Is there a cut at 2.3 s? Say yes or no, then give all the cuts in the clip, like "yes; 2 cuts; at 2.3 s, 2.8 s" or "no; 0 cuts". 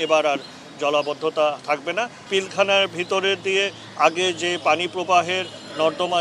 yes; 1 cut; at 2.3 s